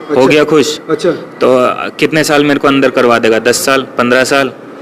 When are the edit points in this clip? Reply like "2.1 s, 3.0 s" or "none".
none